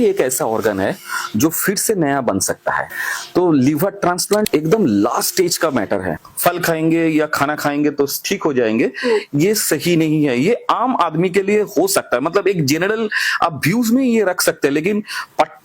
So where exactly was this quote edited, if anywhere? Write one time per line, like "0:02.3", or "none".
0:04.5
0:06.2